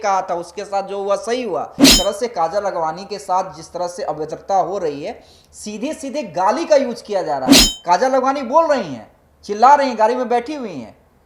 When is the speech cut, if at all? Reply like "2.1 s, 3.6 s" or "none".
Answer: 1.9 s